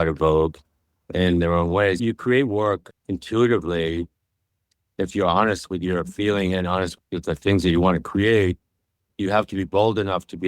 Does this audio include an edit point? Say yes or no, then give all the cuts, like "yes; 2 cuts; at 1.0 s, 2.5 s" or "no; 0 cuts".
yes; 3 cuts; at 2.0 s, 2.9 s, 9.0 s